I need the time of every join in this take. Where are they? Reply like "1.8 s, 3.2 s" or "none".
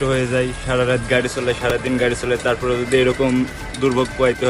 none

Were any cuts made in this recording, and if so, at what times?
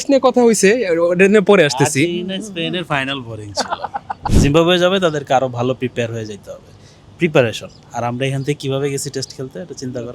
4.2 s

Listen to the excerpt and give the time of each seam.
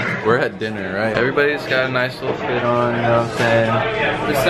1.1 s

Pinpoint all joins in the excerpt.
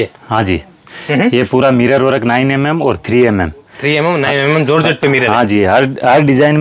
none

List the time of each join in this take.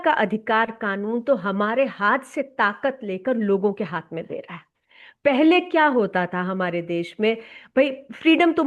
none

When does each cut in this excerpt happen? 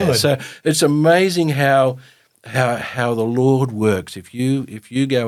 none

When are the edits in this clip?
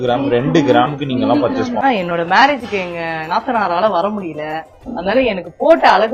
1.8 s

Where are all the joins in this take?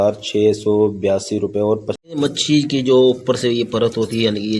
1.9 s

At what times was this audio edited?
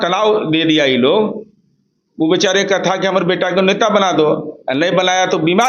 none

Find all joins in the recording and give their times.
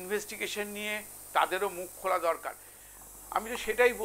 2.9 s

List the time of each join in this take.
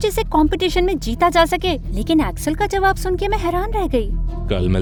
none

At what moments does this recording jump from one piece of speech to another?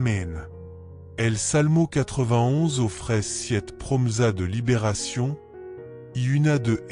1.1 s

